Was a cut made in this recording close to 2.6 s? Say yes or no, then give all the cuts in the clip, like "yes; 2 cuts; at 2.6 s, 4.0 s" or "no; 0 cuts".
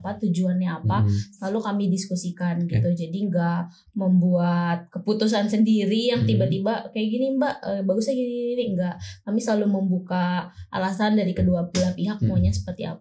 no; 0 cuts